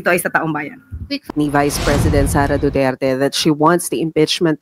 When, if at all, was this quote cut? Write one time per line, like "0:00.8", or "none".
0:01.3